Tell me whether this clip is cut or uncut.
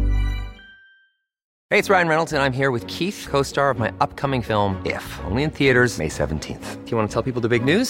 cut